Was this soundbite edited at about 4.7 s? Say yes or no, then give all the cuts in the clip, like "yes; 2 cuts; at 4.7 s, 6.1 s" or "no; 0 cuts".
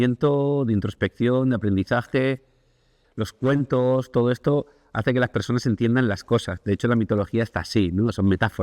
no; 1 cut; at 3.0 s